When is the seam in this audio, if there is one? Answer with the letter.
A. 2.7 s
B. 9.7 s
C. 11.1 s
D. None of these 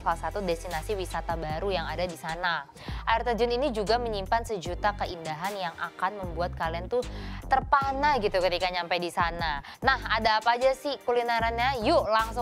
B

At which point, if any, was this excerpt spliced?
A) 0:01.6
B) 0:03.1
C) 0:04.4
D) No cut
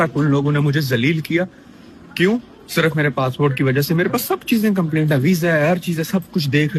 D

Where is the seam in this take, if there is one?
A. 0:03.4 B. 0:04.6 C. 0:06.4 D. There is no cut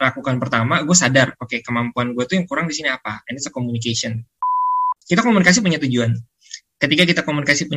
B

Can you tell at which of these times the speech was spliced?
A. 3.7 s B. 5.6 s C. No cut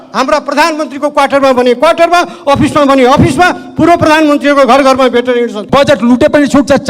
B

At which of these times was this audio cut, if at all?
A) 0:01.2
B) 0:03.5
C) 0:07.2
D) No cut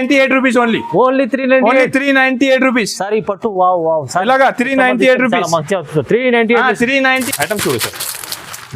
C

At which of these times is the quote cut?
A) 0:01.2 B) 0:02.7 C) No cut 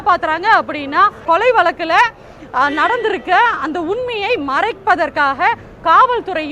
A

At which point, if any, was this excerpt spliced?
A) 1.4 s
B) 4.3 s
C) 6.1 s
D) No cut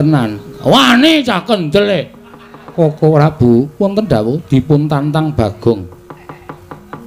D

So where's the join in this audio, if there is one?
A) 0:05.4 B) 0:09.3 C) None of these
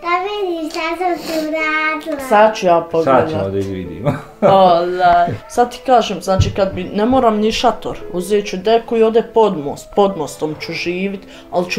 A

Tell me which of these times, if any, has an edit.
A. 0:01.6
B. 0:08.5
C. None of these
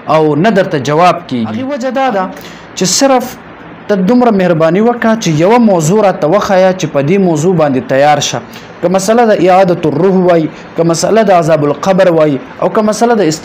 A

